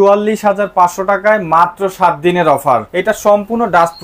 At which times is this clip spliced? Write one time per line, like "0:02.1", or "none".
0:02.9